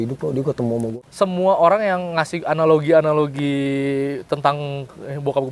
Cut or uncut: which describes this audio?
cut